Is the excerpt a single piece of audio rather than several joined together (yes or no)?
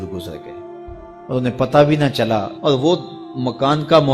yes